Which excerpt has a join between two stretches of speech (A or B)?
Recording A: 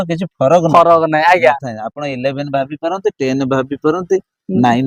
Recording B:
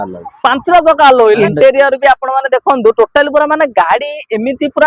B